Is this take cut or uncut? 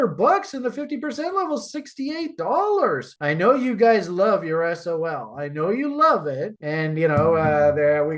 uncut